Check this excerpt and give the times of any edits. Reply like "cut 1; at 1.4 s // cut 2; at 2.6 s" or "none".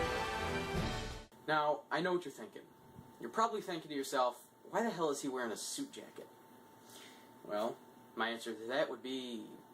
cut 1; at 4.4 s